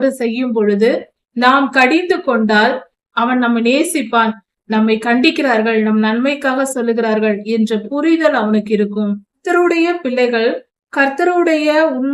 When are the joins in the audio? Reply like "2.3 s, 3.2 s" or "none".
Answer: 2.9 s, 9.4 s